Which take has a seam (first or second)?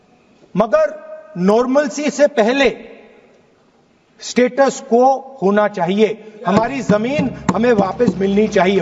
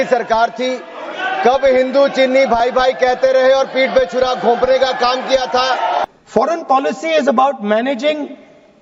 second